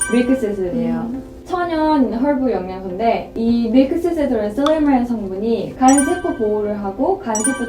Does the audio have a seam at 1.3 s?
yes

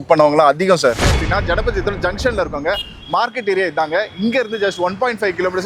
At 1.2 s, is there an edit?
yes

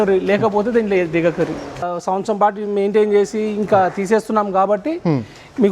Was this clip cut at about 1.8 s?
yes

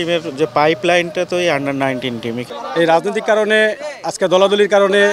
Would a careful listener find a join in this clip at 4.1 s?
no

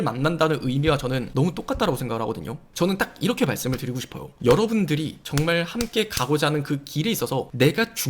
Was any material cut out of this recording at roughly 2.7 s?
yes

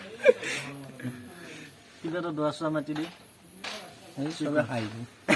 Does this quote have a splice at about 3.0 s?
no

